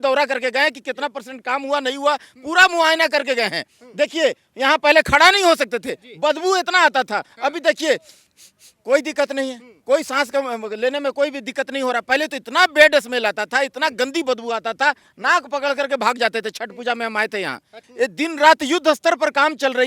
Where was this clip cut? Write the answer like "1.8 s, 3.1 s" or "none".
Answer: 17.8 s